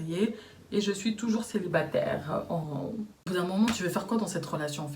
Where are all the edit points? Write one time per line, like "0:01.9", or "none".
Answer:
0:03.1